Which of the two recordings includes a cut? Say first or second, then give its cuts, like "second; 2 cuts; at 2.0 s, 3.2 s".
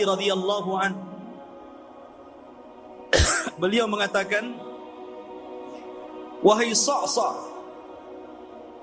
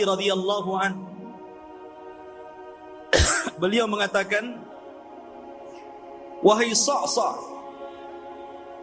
first; 5 cuts; at 1.5 s, 3.0 s, 4.8 s, 6.4 s, 7.5 s